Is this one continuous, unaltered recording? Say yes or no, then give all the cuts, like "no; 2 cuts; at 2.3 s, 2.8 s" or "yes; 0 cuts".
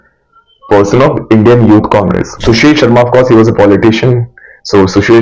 no; 1 cut; at 2.3 s